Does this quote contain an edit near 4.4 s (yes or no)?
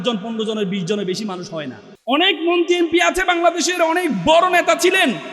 no